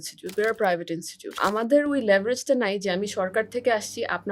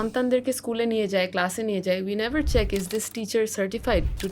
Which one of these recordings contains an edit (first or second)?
first